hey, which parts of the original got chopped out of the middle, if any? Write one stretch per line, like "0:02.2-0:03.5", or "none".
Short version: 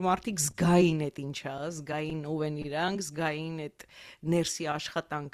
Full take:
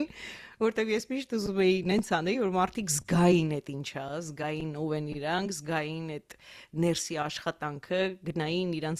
none